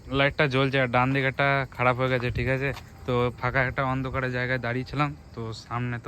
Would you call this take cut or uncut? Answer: uncut